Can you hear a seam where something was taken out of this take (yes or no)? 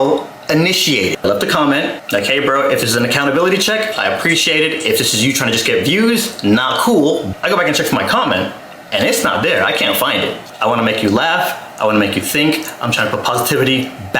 yes